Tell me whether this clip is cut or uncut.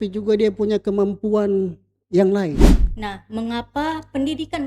cut